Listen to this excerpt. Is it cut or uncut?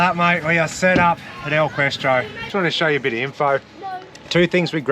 cut